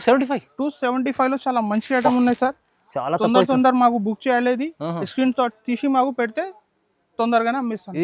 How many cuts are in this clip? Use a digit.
0